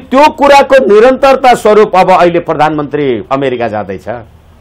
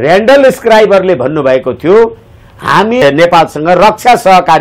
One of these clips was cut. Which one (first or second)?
second